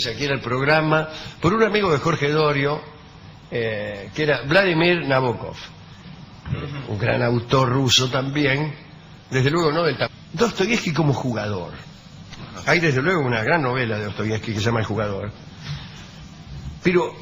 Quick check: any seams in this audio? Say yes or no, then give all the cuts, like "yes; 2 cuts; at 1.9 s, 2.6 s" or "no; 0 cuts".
no; 0 cuts